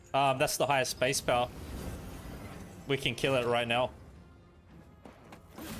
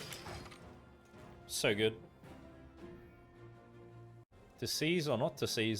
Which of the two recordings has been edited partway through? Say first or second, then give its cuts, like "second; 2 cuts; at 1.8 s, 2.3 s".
second; 1 cut; at 4.3 s